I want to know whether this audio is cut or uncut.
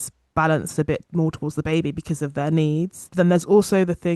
cut